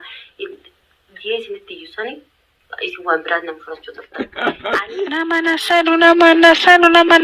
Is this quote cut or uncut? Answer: cut